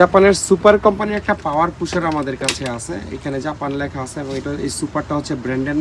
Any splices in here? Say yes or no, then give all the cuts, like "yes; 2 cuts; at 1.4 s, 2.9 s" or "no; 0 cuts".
no; 0 cuts